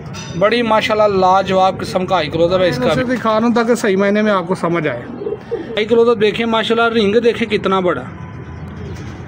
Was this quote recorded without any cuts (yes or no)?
no